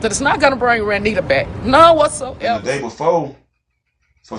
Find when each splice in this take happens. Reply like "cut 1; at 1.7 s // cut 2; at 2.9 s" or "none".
cut 1; at 2.4 s